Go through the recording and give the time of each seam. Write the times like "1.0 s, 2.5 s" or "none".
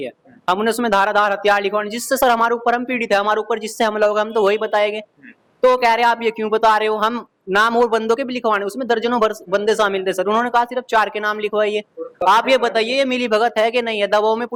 none